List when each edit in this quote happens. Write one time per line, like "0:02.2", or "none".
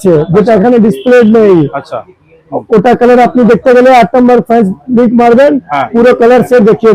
none